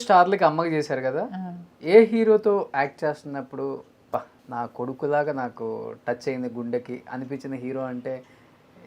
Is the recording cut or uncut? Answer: cut